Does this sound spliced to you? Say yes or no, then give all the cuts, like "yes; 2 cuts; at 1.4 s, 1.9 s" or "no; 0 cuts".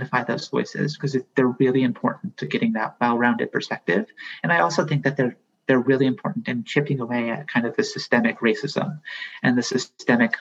no; 0 cuts